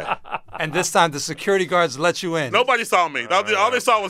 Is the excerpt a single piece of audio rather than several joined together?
no; 1 cut; at 2.5 s

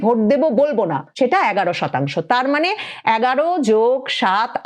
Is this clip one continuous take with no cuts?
no; 1 cut; at 1.0 s

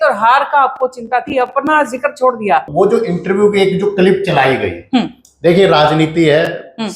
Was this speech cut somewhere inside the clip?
yes; 1 cut; at 2.7 s

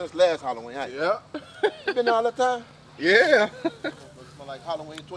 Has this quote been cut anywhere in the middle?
no; 0 cuts

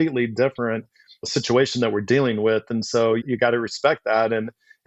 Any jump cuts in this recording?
yes; 1 cut; at 3.2 s

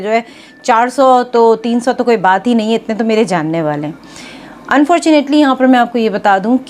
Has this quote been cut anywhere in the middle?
no; 0 cuts

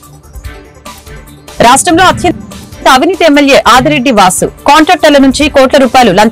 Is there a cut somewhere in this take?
yes; 1 cut; at 0.9 s

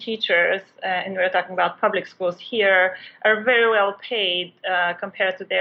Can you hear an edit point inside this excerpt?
no; 0 cuts

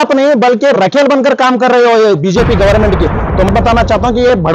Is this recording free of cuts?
no; 1 cut; at 3.5 s

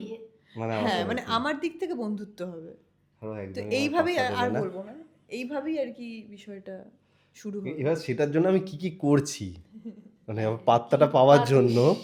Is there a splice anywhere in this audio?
no; 0 cuts

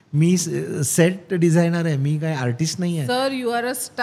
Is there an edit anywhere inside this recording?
no; 0 cuts

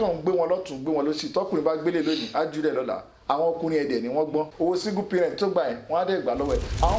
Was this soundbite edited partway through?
yes; 1 cut; at 4.5 s

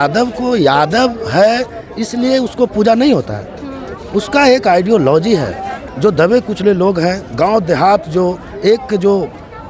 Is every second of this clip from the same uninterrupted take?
no; 1 cut; at 5.8 s

